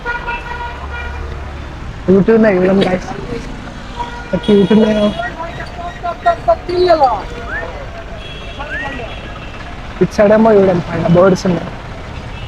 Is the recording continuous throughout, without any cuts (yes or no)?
yes